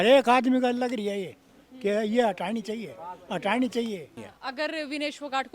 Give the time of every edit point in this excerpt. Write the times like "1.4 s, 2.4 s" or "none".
4.3 s